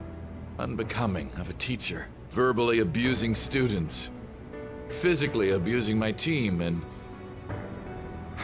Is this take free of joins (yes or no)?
no